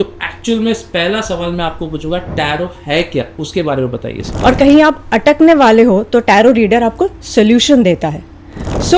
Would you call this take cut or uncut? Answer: cut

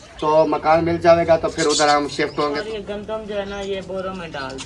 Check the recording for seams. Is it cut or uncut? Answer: cut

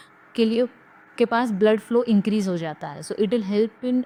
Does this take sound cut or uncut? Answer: uncut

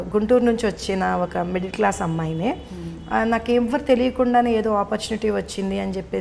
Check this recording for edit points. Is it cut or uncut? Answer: uncut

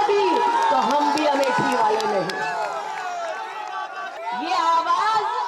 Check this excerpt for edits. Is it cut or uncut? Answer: cut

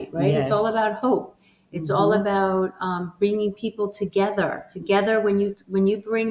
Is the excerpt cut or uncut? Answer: uncut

